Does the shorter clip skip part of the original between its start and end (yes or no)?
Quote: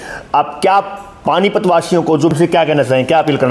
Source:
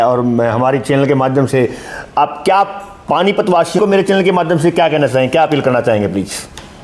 yes